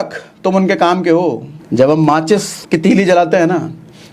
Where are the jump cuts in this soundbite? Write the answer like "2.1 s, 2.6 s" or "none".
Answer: 1.5 s, 2.5 s